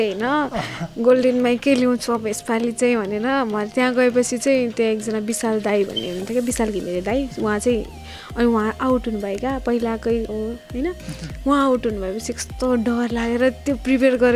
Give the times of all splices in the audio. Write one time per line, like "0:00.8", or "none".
none